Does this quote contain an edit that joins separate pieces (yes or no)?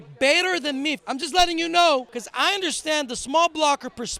yes